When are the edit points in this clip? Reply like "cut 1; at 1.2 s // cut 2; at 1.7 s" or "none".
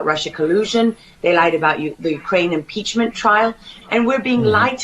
cut 1; at 3.7 s